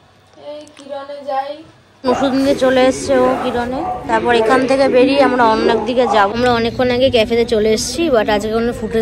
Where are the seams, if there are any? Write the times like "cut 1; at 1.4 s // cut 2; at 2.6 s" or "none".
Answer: cut 1; at 2.0 s // cut 2; at 6.3 s